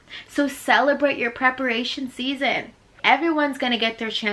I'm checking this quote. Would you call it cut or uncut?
cut